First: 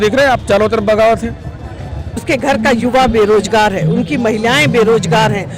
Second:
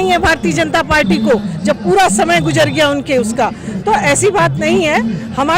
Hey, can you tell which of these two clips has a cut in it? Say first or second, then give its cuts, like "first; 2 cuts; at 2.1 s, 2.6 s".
first; 1 cut; at 2.2 s